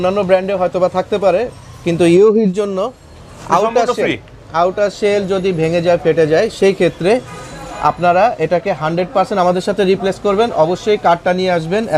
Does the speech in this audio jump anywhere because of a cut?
no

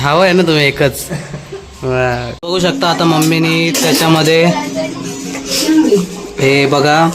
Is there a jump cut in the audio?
yes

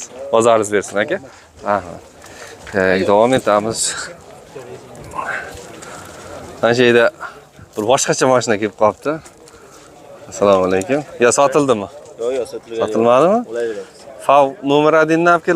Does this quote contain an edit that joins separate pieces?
no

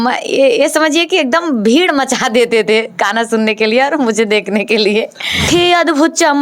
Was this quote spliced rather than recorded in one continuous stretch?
yes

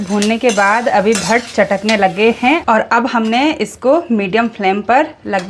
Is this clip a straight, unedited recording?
no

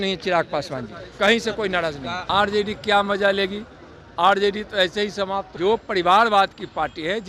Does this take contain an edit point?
yes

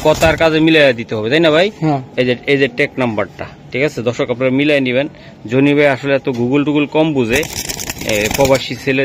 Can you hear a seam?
no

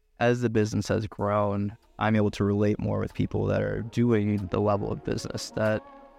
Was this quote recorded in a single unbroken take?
yes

